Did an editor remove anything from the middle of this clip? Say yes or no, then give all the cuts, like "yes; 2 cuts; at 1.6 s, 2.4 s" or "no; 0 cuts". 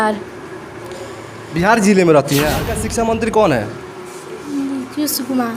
yes; 1 cut; at 2.8 s